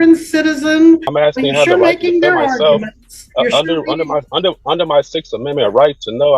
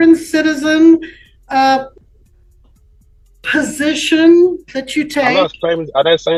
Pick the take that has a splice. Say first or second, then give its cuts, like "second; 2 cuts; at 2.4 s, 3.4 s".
first; 1 cut; at 1.1 s